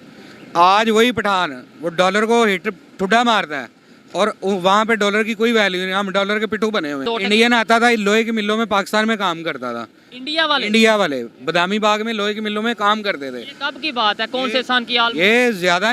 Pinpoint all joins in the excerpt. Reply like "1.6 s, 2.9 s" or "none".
7.0 s